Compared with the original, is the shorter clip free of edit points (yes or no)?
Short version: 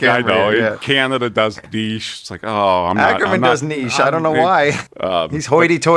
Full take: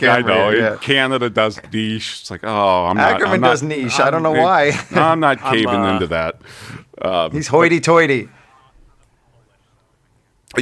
no